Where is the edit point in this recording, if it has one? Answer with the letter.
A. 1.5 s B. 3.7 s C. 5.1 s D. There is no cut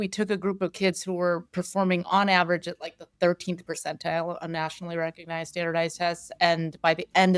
D